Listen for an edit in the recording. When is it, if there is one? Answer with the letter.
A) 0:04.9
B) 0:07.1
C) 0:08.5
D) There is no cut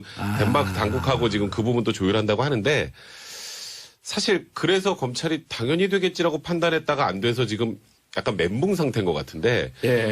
B